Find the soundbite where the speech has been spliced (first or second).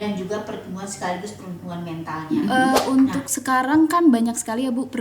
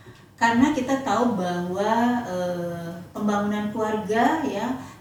first